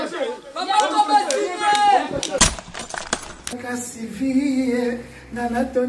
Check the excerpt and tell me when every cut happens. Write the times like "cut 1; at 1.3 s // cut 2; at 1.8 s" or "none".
cut 1; at 2.4 s